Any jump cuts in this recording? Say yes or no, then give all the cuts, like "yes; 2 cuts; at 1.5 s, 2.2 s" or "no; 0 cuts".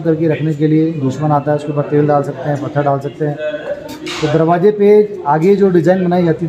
no; 0 cuts